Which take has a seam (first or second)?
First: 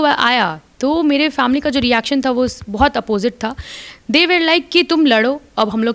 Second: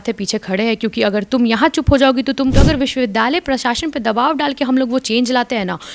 second